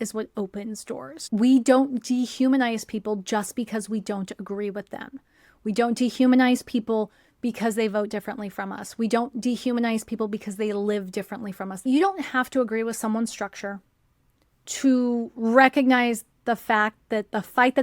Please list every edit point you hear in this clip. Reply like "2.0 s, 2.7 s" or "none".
1.3 s, 11.8 s